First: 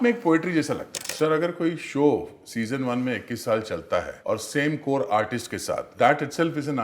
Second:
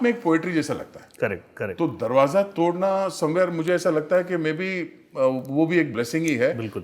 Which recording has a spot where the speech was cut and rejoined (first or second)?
first